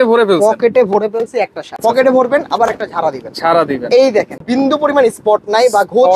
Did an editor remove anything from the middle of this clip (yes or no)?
yes